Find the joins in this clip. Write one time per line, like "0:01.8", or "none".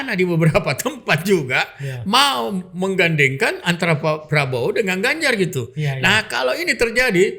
none